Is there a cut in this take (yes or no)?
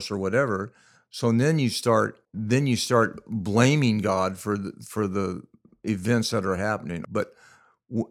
yes